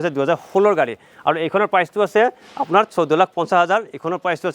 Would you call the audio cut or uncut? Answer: uncut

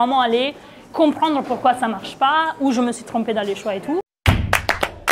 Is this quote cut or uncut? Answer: cut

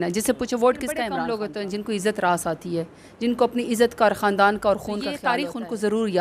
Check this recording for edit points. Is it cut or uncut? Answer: cut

